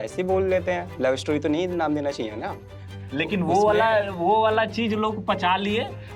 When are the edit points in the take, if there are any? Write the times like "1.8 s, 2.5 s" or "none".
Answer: 2.8 s